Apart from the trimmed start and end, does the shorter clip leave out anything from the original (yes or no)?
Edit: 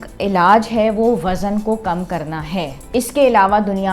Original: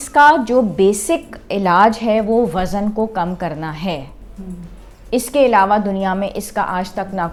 yes